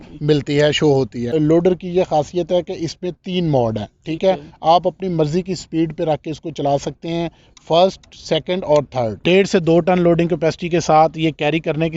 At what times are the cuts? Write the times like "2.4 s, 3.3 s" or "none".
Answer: 1.3 s, 9.2 s